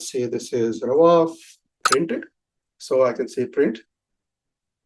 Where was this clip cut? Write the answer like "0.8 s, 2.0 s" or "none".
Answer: 1.8 s

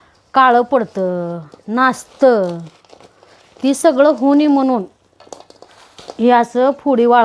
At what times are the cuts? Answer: none

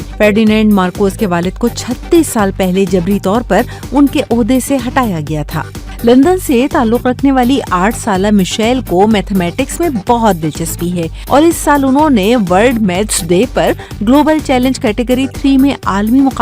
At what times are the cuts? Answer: 5.7 s

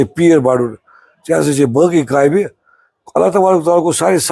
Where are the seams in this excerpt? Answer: none

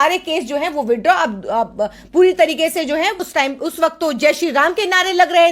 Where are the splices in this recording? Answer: 3.2 s

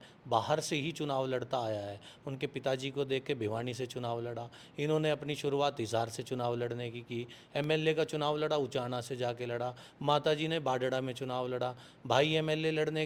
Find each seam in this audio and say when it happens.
none

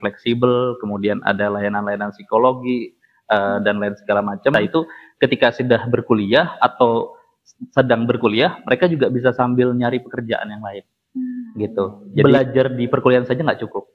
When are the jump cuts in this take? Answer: 4.5 s, 12.2 s

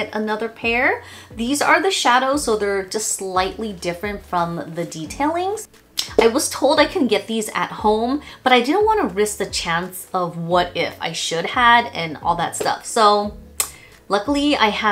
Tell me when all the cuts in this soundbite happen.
none

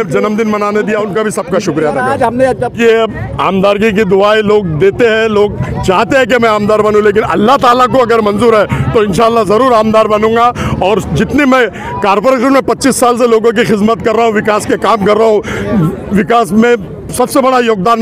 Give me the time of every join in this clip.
2.7 s

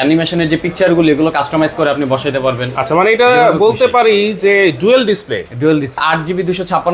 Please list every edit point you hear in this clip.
6.0 s

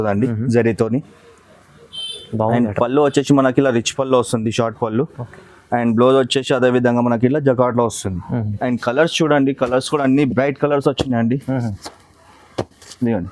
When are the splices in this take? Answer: 8.5 s

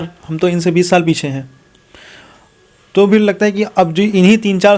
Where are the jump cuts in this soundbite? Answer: none

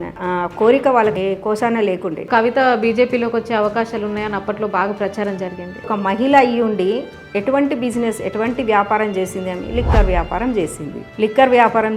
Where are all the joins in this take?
1.2 s, 2.3 s, 5.9 s

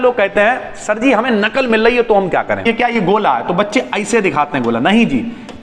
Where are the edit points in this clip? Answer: 2.6 s

